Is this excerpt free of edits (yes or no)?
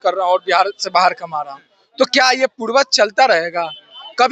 yes